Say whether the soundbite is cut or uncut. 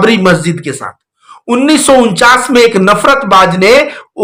uncut